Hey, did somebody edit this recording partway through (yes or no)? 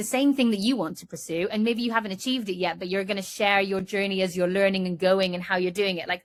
no